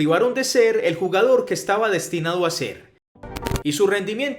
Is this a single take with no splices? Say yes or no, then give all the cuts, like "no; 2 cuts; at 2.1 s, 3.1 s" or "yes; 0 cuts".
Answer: no; 1 cut; at 3.4 s